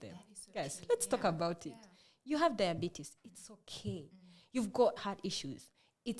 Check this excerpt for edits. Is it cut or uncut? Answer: cut